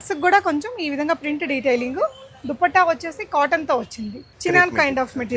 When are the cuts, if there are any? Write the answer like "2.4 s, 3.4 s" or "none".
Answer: 4.3 s